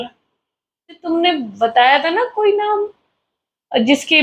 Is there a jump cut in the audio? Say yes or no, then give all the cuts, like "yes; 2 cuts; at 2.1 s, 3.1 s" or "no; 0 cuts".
yes; 1 cut; at 1.0 s